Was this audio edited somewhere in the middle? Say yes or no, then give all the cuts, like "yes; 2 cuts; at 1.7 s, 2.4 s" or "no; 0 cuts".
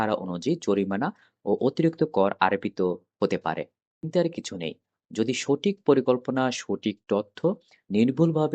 yes; 1 cut; at 4.1 s